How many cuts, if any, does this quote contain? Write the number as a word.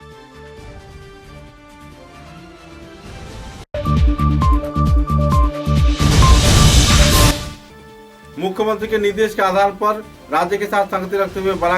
two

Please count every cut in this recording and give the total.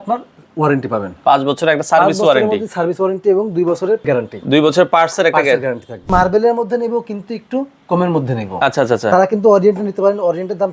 two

